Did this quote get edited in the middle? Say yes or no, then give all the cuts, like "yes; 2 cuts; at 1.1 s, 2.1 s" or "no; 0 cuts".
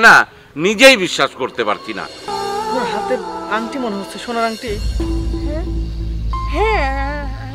yes; 1 cut; at 2.3 s